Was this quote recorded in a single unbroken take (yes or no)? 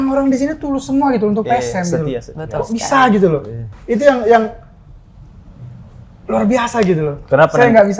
yes